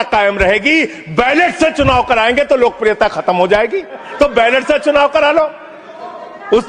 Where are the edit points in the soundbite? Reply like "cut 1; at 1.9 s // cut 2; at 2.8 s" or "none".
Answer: cut 1; at 4.0 s